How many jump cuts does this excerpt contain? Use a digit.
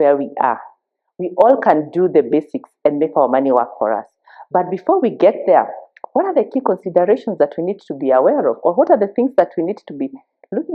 0